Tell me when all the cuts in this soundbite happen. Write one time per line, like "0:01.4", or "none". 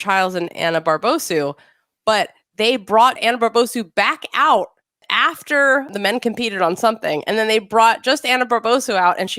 0:03.2
0:05.0
0:05.9